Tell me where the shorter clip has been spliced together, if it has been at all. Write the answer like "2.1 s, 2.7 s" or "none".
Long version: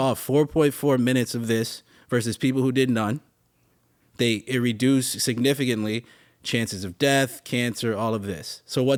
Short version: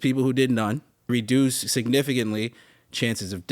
1.1 s